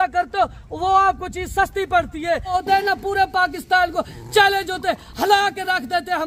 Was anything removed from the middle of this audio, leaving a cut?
yes; 1 cut; at 2.8 s

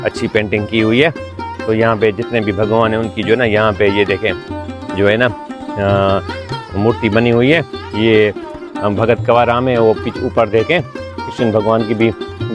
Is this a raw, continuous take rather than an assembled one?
yes; 0 cuts

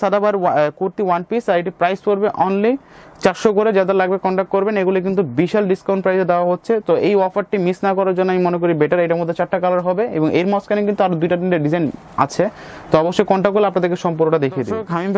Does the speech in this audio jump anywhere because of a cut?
no; 0 cuts

